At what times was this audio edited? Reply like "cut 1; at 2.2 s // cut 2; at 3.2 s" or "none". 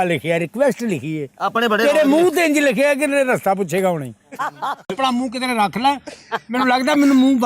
cut 1; at 4.9 s